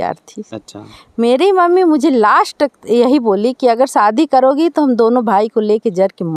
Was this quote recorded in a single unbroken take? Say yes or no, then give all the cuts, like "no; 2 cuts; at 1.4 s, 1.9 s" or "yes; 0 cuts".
yes; 0 cuts